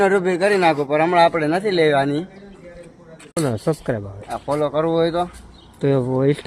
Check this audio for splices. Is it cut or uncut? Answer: cut